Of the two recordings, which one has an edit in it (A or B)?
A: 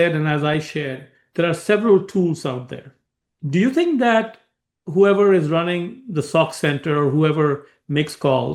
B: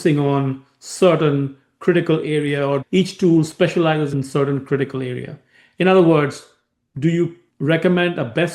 B